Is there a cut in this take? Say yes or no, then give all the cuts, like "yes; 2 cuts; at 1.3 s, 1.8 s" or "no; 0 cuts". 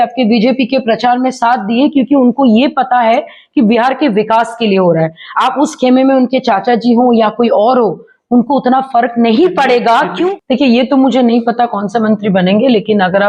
yes; 1 cut; at 10.3 s